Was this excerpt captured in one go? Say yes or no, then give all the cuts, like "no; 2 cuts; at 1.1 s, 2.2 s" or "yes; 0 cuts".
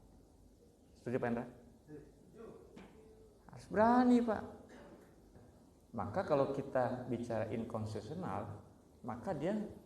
no; 1 cut; at 5.4 s